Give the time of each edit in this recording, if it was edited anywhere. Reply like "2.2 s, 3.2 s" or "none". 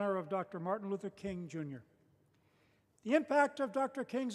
none